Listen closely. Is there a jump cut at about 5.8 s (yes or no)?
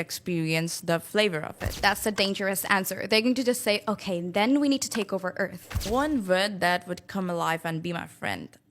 yes